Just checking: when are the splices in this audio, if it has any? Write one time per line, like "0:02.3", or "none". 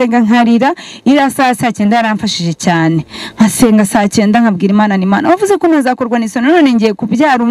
none